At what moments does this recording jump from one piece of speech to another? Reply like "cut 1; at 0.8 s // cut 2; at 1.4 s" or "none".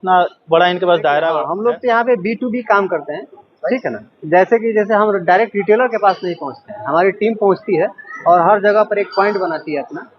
cut 1; at 1.5 s